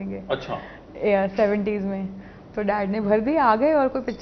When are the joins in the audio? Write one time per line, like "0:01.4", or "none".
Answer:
none